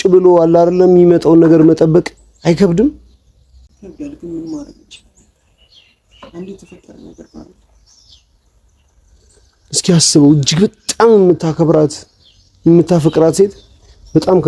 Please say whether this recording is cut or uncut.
uncut